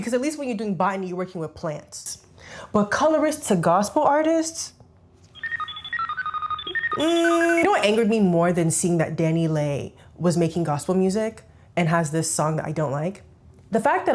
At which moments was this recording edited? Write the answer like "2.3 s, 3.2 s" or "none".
2.1 s, 7.6 s